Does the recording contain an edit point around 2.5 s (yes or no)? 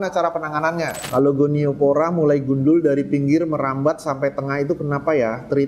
no